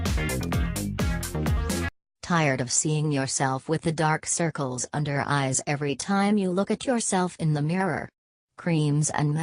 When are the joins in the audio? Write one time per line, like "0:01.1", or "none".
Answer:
0:04.5